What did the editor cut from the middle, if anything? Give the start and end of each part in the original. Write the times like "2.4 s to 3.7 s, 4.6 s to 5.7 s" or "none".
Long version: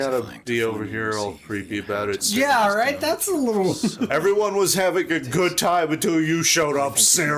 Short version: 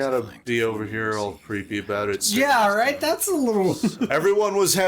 none